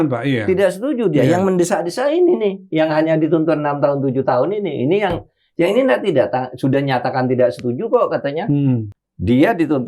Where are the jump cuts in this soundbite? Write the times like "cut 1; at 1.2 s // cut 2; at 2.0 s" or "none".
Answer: cut 1; at 9.0 s

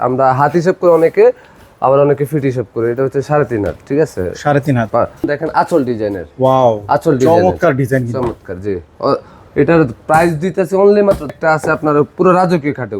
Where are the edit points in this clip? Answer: cut 1; at 5.3 s // cut 2; at 11.4 s

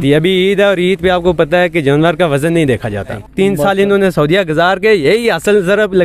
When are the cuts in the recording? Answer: cut 1; at 3.2 s

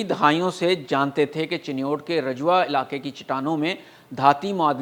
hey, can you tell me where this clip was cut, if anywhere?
none

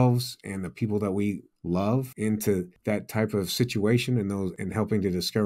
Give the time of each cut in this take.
cut 1; at 1.9 s // cut 2; at 2.7 s // cut 3; at 4.6 s

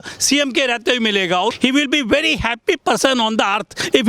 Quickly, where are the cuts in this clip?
cut 1; at 1.5 s

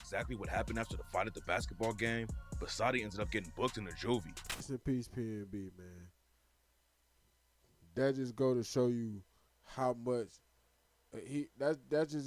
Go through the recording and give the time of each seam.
cut 1; at 4.7 s

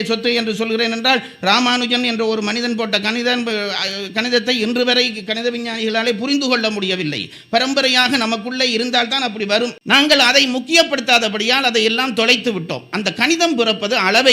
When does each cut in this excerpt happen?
none

